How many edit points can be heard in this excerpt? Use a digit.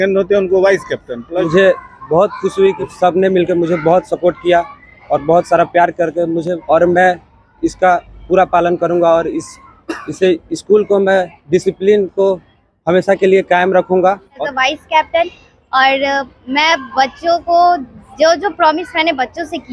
4